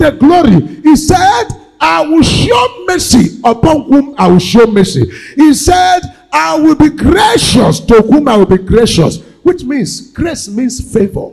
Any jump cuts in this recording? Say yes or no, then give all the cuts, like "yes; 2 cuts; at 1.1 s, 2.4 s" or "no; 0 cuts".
no; 0 cuts